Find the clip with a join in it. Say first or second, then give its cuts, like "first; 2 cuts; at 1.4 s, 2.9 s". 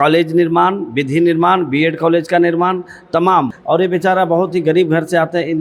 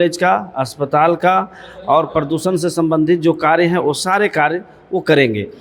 first; 1 cut; at 3.6 s